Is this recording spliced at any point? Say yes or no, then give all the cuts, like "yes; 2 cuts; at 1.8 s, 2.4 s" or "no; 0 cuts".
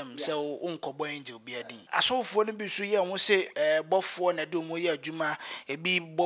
yes; 1 cut; at 1.9 s